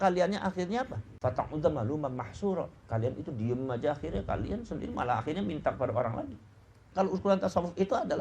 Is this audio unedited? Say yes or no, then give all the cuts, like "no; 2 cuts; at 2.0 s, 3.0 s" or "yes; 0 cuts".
no; 2 cuts; at 1.0 s, 6.8 s